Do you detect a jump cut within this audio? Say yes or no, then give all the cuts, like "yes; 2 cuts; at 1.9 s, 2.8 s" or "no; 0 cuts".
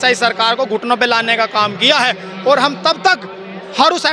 no; 0 cuts